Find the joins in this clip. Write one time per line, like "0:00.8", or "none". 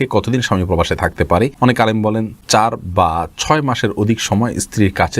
0:01.5
0:02.4